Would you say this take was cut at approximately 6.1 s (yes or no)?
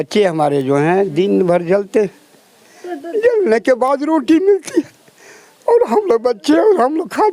no